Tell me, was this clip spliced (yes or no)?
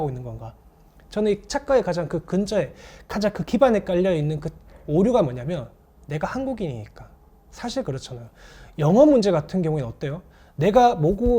no